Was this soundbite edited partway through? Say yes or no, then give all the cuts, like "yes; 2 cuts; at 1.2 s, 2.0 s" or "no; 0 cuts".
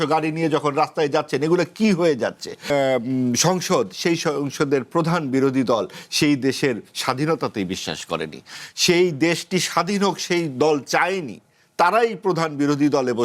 yes; 1 cut; at 2.7 s